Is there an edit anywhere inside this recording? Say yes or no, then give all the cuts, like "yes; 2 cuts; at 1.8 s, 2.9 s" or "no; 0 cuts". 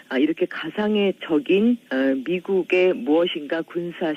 no; 0 cuts